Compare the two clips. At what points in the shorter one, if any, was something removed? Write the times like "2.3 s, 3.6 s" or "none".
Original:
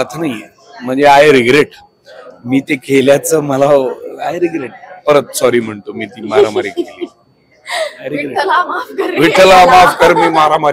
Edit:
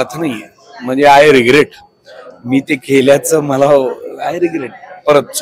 none